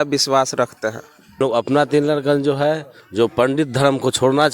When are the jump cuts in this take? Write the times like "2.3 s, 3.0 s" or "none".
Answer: 1.4 s

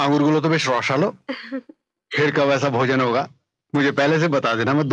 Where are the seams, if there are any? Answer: none

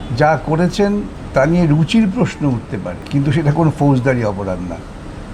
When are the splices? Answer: 1.2 s, 3.0 s

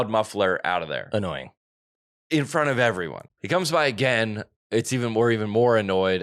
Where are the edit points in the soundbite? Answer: 3.2 s

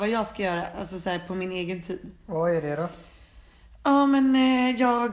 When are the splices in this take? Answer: none

